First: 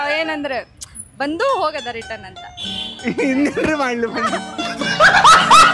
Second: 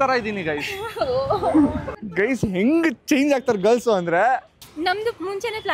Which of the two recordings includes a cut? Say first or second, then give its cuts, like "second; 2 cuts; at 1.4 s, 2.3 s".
second; 2 cuts; at 1.8 s, 4.5 s